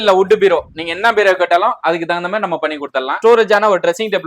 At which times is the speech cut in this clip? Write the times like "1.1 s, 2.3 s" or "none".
3.1 s